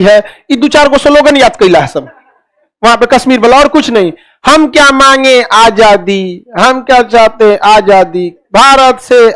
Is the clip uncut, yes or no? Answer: yes